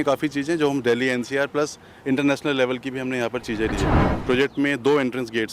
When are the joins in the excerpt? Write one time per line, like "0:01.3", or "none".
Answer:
0:04.1